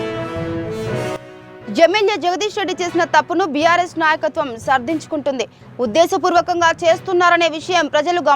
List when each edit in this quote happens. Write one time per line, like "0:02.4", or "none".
0:01.1